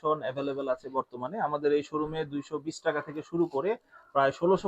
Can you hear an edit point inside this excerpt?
no; 0 cuts

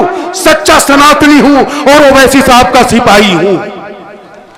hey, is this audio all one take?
yes; 0 cuts

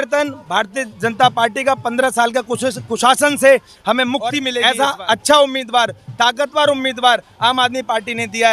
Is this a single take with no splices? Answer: no; 1 cut; at 4.5 s

